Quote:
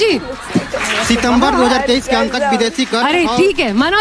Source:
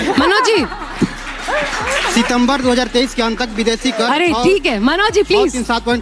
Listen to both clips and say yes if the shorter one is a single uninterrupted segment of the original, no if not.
no